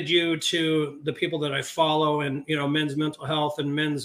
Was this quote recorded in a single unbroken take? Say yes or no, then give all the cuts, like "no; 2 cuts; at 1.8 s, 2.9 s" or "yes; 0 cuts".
yes; 0 cuts